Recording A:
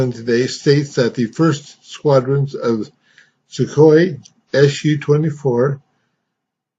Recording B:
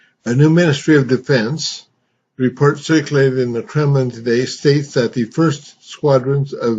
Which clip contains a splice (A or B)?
B